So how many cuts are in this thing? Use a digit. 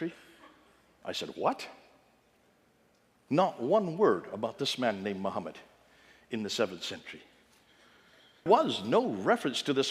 1